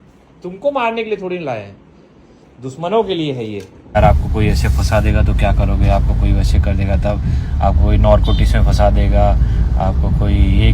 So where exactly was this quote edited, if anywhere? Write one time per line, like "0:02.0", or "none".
0:04.0